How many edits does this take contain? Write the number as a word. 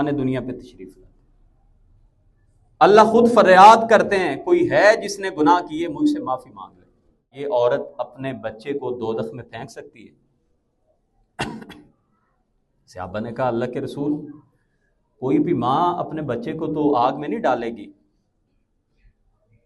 one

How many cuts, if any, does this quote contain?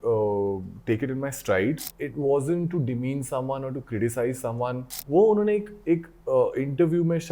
two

